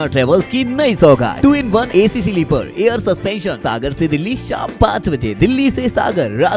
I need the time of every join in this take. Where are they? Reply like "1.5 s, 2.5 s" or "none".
1.5 s, 3.6 s